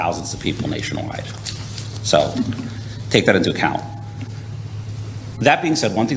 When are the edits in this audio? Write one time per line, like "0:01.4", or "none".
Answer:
none